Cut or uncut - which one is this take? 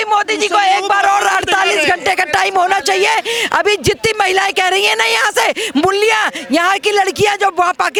uncut